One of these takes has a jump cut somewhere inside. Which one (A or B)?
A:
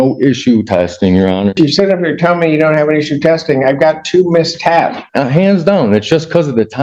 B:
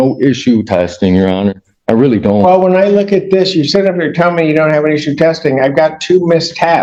A